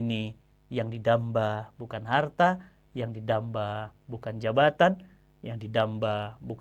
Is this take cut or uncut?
uncut